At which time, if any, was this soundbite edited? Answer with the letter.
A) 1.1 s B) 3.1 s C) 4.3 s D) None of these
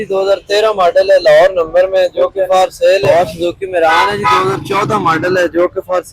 B